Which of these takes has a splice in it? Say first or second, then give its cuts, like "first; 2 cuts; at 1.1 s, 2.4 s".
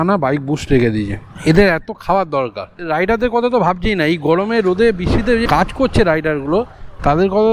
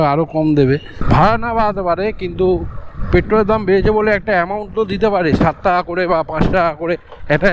second; 1 cut; at 0.9 s